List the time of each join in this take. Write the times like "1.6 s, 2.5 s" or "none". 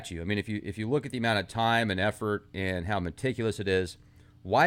1.5 s